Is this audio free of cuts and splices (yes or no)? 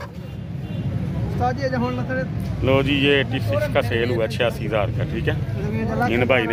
yes